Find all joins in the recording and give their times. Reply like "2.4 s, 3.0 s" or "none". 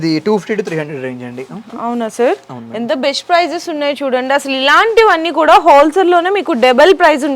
none